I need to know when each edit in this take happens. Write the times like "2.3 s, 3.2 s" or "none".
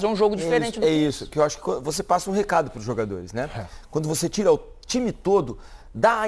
none